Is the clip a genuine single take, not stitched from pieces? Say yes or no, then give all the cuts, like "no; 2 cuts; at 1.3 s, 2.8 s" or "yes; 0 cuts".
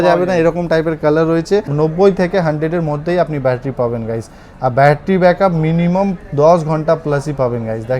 no; 1 cut; at 1.7 s